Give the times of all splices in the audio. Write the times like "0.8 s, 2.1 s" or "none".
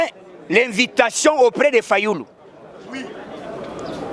none